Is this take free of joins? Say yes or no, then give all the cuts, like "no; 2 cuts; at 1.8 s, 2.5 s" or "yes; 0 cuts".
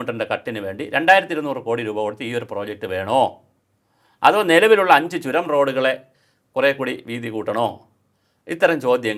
yes; 0 cuts